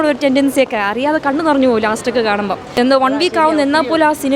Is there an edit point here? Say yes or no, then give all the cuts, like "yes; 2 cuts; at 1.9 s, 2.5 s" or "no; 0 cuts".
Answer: yes; 1 cut; at 2.8 s